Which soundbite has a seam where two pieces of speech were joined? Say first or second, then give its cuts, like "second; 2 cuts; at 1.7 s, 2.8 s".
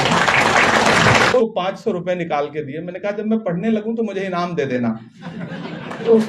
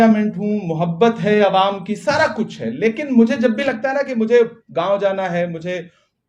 first; 1 cut; at 1.3 s